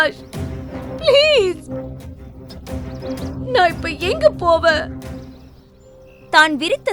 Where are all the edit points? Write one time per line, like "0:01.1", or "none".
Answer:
none